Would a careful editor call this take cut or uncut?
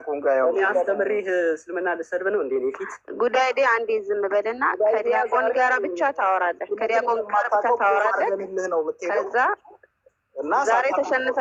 uncut